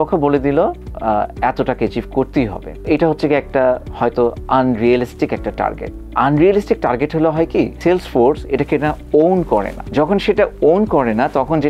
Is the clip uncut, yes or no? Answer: yes